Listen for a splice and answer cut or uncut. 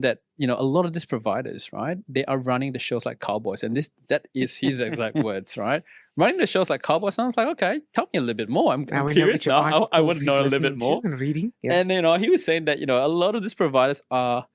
uncut